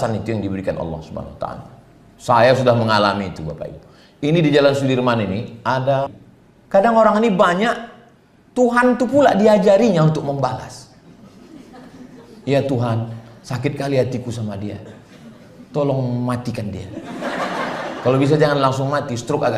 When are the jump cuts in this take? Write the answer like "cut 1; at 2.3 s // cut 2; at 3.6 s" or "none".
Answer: cut 1; at 6.2 s